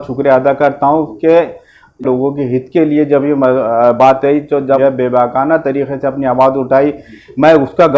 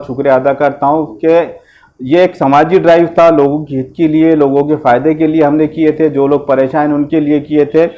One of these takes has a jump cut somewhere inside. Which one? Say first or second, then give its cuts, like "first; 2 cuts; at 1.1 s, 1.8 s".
first; 2 cuts; at 2.0 s, 4.8 s